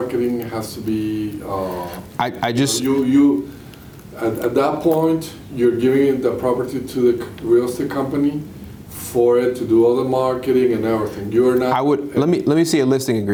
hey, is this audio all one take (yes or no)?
yes